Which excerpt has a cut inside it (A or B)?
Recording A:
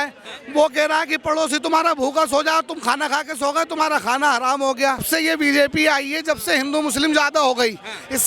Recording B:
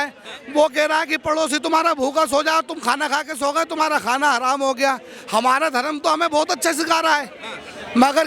A